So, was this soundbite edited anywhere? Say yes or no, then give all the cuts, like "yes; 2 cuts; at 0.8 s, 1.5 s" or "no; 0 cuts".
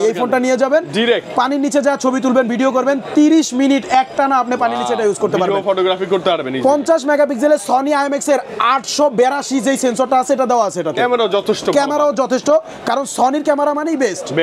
no; 0 cuts